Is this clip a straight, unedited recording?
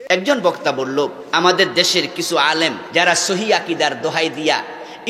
no; 2 cuts; at 1.2 s, 2.8 s

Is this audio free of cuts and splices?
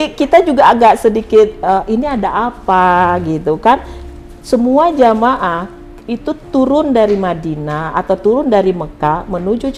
yes; 0 cuts

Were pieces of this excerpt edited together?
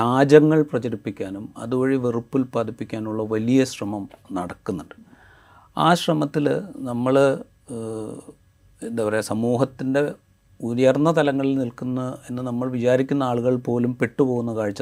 no; 0 cuts

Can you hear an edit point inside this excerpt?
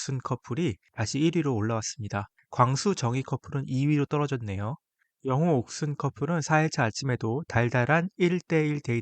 no; 0 cuts

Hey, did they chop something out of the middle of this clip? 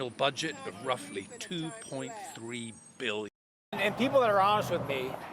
yes; 1 cut; at 3.8 s

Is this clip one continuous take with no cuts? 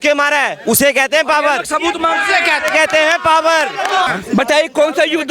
no; 1 cut; at 4.1 s

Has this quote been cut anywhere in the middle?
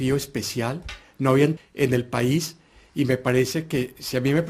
no; 0 cuts

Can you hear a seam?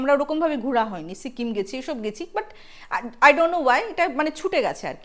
no; 0 cuts

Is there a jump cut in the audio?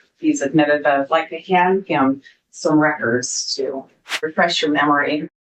yes; 1 cut; at 4.3 s

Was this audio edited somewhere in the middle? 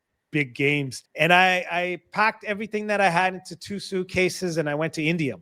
yes; 1 cut; at 1.0 s

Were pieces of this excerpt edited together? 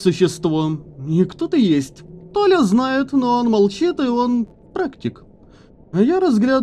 no; 0 cuts

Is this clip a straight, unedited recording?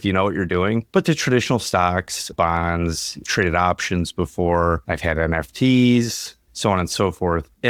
yes; 0 cuts

